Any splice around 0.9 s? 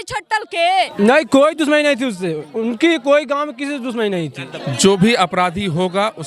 yes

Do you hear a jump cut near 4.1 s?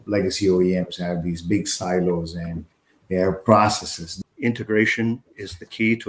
yes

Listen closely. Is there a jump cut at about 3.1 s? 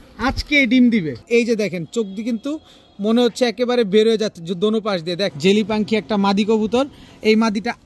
no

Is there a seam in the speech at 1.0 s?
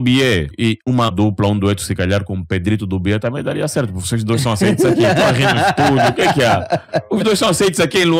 yes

